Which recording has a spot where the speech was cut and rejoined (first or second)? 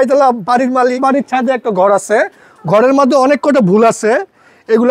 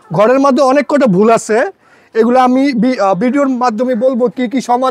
first